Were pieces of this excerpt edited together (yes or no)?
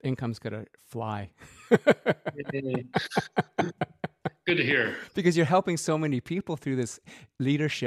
no